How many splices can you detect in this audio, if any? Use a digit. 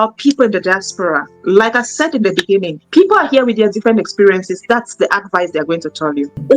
1